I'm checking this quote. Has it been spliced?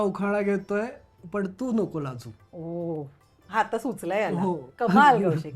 no; 0 cuts

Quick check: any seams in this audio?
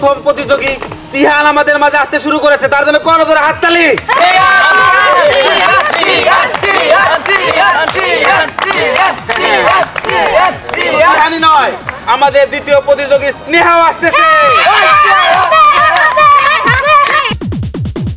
no; 0 cuts

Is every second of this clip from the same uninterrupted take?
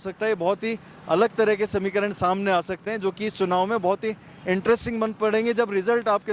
yes; 0 cuts

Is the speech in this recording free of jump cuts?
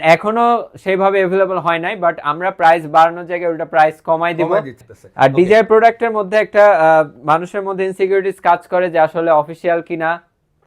no; 1 cut; at 4.9 s

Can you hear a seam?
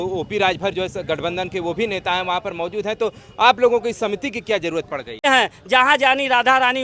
yes; 1 cut; at 5.3 s

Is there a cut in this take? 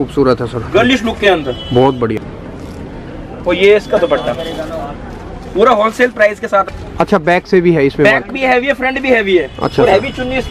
yes; 2 cuts; at 2.3 s, 6.7 s

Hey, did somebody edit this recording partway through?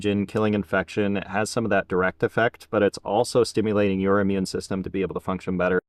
no; 0 cuts

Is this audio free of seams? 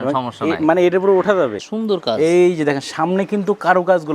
no; 1 cut; at 1.6 s

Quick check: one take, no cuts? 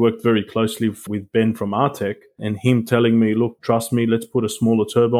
no; 3 cuts; at 1.0 s, 2.5 s, 3.6 s

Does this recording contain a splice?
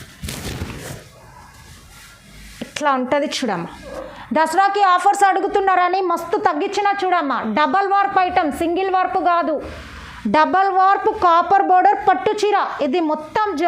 yes; 1 cut; at 4.0 s

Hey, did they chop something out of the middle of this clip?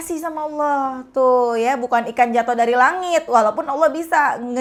no; 0 cuts

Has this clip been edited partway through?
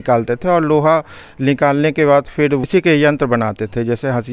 yes; 1 cut; at 2.6 s

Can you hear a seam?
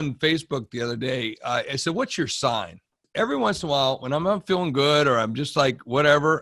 yes; 1 cut; at 3.0 s

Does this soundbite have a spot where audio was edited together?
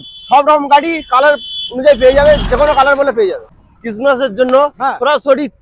yes; 1 cut; at 3.5 s

